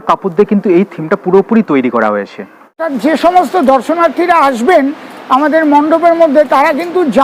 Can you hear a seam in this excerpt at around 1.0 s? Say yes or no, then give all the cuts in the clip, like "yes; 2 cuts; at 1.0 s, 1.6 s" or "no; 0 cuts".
no; 1 cut; at 2.7 s